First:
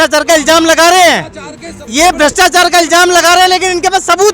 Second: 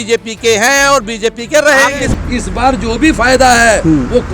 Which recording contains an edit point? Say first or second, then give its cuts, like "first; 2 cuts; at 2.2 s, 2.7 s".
second; 1 cut; at 2.0 s